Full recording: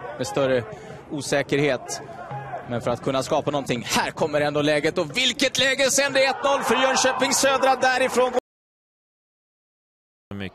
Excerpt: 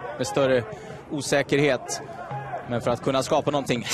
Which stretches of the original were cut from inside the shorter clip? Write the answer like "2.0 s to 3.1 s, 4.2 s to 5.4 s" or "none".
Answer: none